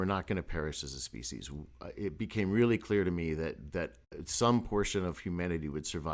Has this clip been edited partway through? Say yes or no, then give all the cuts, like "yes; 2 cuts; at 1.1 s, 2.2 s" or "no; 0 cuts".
no; 0 cuts